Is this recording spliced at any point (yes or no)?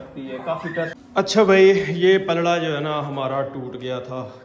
yes